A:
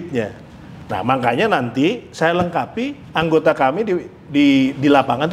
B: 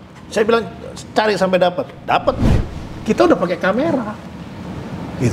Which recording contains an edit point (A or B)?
B